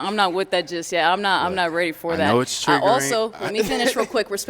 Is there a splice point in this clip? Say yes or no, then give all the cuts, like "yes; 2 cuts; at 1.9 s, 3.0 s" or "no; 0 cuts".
yes; 1 cut; at 1.2 s